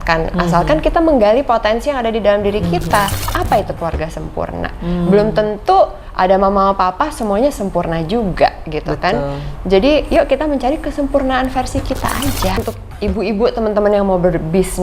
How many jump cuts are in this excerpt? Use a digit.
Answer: 2